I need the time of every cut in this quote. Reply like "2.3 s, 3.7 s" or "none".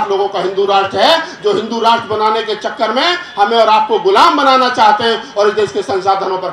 none